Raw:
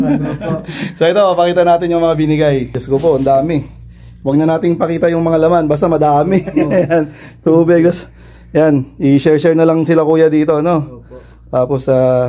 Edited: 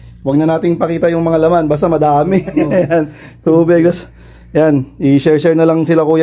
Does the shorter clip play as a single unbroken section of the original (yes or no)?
yes